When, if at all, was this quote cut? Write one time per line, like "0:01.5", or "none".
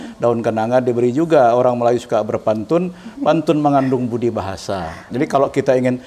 0:05.0